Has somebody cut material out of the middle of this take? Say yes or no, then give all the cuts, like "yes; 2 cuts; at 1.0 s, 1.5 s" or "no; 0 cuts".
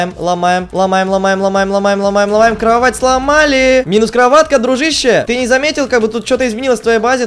no; 0 cuts